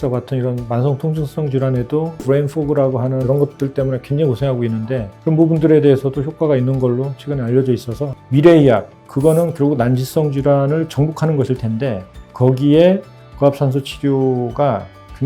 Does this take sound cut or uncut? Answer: cut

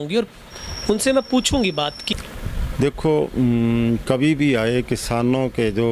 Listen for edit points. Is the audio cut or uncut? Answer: cut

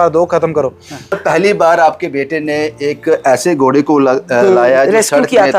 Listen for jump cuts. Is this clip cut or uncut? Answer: cut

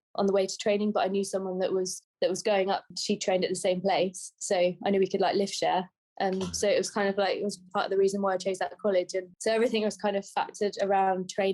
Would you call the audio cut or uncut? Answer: uncut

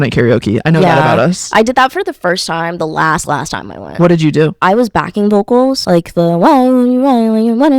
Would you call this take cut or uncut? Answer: cut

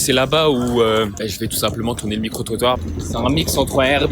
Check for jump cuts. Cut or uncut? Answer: cut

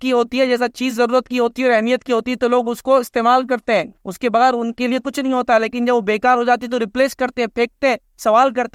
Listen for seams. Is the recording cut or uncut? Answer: uncut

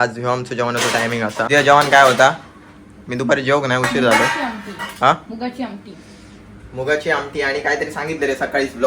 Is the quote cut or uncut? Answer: cut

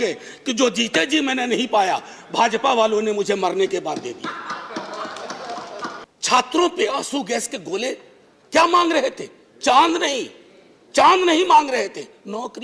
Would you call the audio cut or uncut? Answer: cut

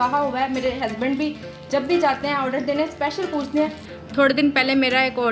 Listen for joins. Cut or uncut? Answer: cut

